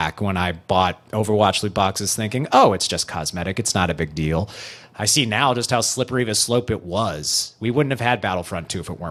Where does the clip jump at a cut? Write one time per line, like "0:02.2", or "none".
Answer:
none